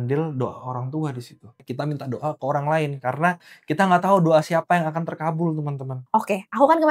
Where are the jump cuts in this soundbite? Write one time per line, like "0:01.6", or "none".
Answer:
0:01.7
0:06.0